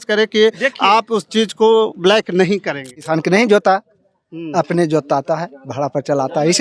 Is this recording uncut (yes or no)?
no